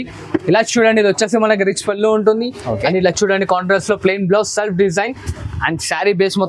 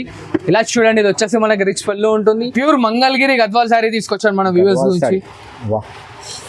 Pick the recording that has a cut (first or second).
second